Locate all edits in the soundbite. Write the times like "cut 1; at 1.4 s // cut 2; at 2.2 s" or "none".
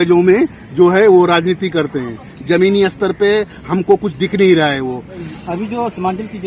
cut 1; at 5.2 s